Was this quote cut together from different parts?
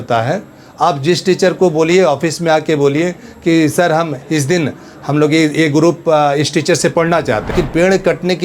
yes; 1 cut; at 7.5 s

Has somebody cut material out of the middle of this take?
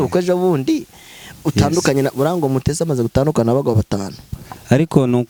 no; 0 cuts

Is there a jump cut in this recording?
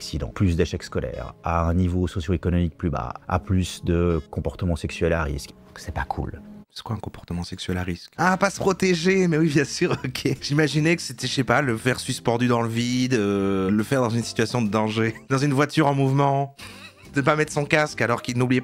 yes; 1 cut; at 13.7 s

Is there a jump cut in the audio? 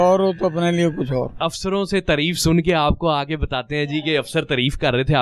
yes; 1 cut; at 1.4 s

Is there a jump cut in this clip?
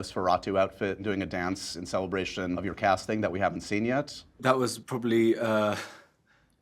yes; 3 cuts; at 1.0 s, 2.6 s, 4.3 s

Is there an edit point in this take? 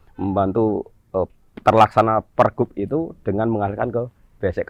no; 0 cuts

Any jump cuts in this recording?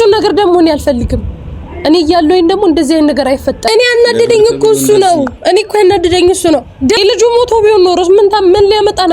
yes; 2 cuts; at 3.7 s, 7.0 s

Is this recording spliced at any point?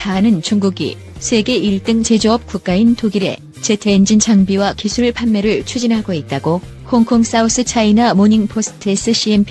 no; 0 cuts

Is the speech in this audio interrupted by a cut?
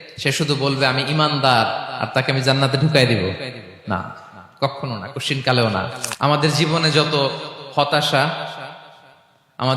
yes; 1 cut; at 6.0 s

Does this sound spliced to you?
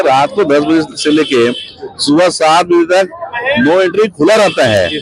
no; 0 cuts

